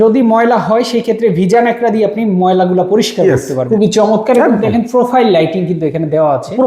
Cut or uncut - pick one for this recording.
cut